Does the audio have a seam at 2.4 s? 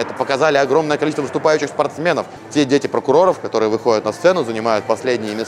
yes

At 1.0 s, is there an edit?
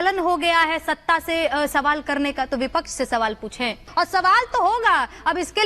no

